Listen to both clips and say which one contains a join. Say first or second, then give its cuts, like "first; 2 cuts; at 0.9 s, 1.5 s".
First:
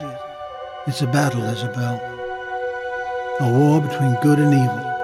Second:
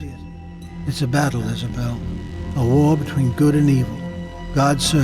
second; 1 cut; at 2.6 s